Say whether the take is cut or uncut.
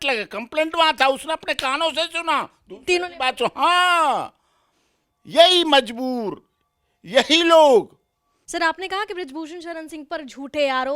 uncut